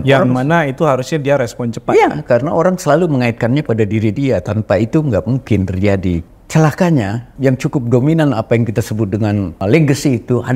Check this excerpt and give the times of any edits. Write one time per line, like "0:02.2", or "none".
0:06.2
0:07.2
0:09.6

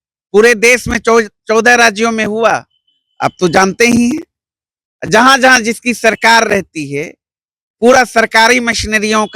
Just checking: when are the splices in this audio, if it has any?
none

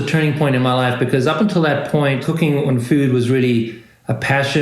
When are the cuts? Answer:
0:02.3

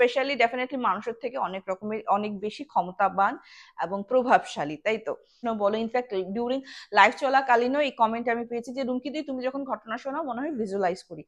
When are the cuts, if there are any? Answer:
0:05.3

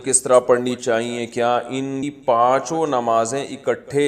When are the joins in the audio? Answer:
0:02.1

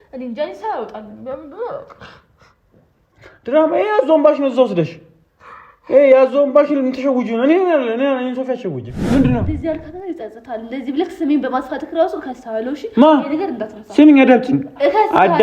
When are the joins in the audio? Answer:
0:09.0

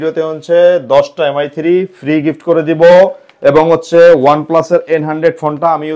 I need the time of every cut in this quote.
none

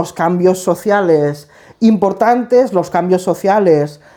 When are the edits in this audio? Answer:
none

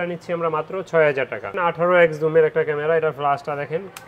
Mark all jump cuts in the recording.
0:01.5

